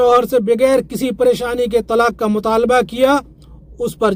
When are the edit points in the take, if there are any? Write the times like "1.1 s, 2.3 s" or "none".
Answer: none